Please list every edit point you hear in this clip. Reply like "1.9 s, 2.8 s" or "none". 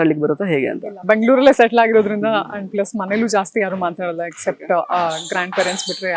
none